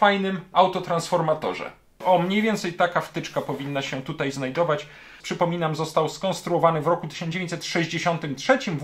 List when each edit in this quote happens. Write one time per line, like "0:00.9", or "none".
0:01.9
0:05.2